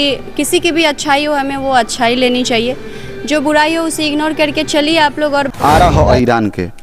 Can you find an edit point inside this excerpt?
yes; 1 cut; at 5.5 s

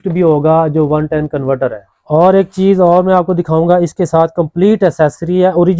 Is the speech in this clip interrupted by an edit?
yes; 1 cut; at 1.9 s

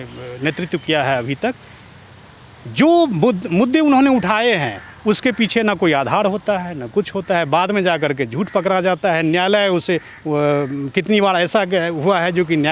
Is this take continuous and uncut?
yes; 0 cuts

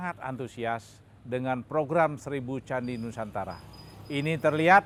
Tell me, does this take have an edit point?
no; 0 cuts

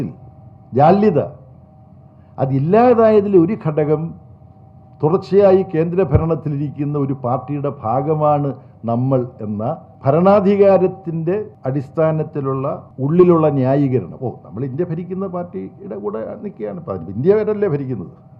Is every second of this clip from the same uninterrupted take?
no; 3 cuts; at 9.9 s, 11.5 s, 12.9 s

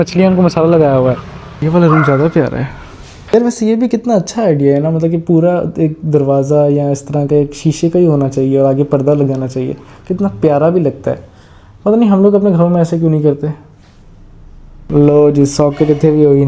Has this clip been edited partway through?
yes; 2 cuts; at 1.6 s, 3.2 s

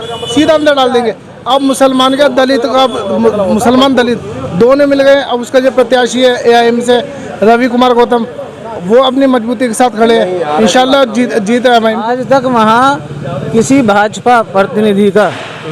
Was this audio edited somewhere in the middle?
yes; 1 cut; at 12.1 s

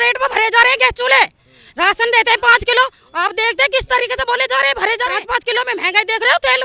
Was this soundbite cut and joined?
yes; 1 cut; at 5.2 s

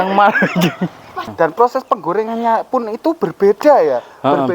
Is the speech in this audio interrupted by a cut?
yes; 1 cut; at 1.1 s

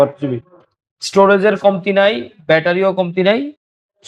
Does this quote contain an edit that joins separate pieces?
no; 0 cuts

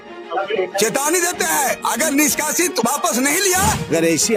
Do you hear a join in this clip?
no; 0 cuts

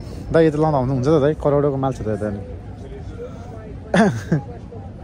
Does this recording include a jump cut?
no; 0 cuts

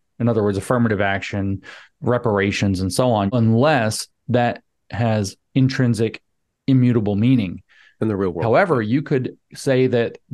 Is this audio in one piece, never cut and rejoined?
no; 1 cut; at 3.3 s

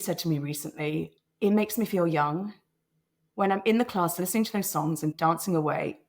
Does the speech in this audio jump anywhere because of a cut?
yes; 2 cuts; at 1.2 s, 5.1 s

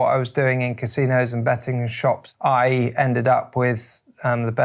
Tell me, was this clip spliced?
yes; 1 cut; at 2.3 s

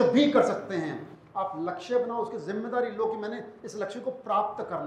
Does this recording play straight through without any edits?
yes; 0 cuts

